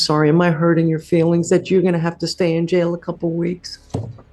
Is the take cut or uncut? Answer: uncut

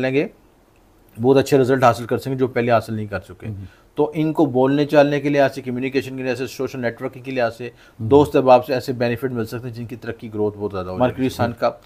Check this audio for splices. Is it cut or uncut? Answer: cut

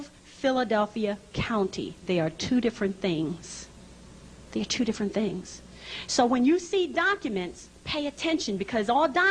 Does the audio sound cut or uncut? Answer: cut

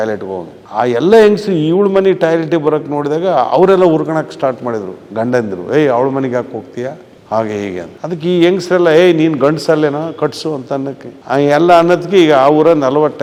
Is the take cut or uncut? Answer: uncut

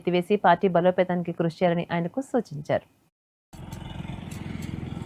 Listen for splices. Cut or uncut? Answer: uncut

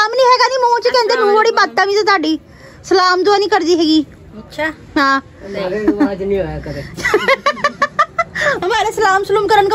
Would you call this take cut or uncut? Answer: cut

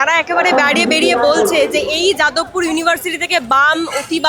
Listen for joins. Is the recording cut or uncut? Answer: uncut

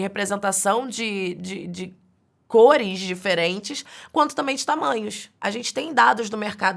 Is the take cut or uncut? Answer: cut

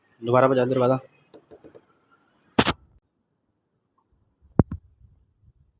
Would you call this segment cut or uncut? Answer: cut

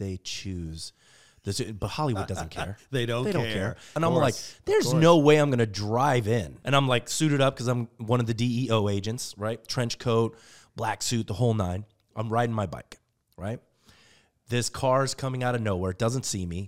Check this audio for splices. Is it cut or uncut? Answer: cut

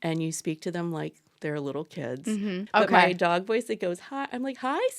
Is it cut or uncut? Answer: cut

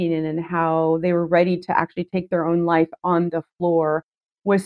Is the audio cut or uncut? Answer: uncut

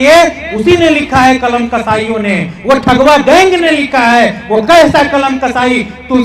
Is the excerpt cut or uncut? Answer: uncut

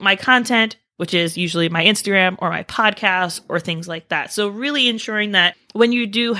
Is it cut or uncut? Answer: uncut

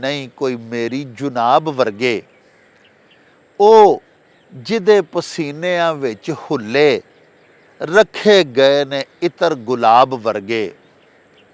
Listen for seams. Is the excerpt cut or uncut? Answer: uncut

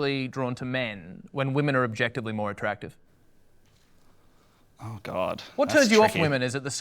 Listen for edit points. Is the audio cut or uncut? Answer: uncut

